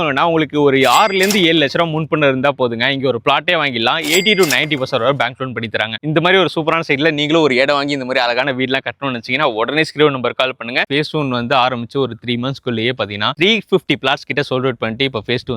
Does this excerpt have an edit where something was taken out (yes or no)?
yes